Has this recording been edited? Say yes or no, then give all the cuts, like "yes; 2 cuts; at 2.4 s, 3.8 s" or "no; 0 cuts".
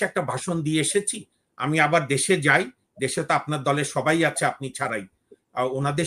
no; 0 cuts